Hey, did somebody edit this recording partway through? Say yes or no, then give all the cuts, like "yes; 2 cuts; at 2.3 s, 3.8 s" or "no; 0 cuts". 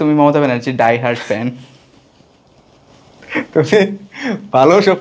no; 0 cuts